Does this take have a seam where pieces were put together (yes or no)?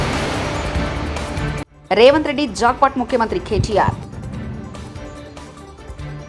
yes